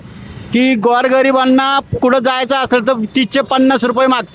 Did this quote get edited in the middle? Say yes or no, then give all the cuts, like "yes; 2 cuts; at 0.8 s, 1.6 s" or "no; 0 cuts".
no; 0 cuts